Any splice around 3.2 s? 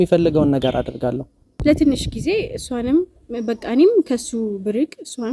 no; 1 cut; at 1.5 s

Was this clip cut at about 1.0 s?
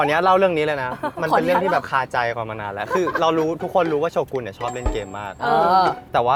no; 0 cuts

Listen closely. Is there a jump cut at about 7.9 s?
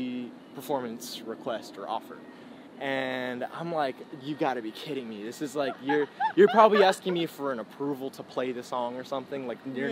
no; 0 cuts

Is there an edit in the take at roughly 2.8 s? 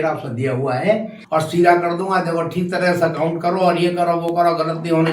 no; 1 cut; at 1.1 s

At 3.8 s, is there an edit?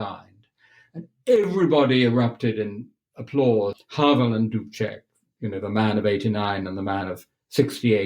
yes; 1 cut; at 3.8 s

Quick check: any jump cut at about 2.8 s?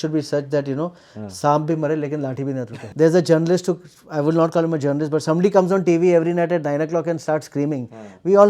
yes; 1 cut; at 2.8 s

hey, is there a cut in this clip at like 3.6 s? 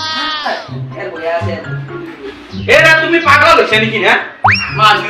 no; 1 cut; at 2.3 s

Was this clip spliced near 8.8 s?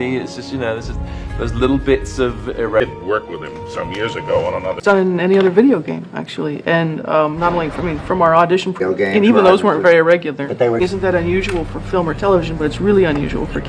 yes; 4 cuts; at 2.8 s, 4.8 s, 8.8 s, 10.8 s

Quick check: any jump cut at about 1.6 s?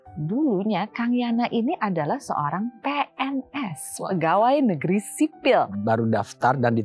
no; 1 cut; at 5.7 s

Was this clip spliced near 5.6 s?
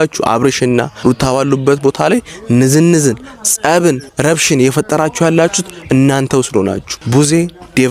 no; 3 cuts; at 0.9 s, 4.1 s, 6.9 s

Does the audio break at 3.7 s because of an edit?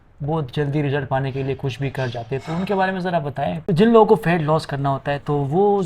yes; 1 cut; at 3.7 s

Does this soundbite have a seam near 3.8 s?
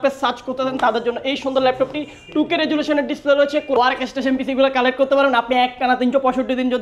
yes; 1 cut; at 3.8 s

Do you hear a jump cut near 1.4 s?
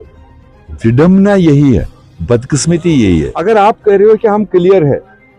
no; 1 cut; at 3.3 s

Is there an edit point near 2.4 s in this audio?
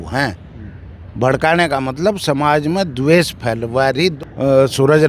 no; 1 cut; at 4.1 s

